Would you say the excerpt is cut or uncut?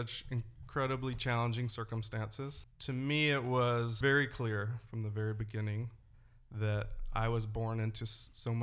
cut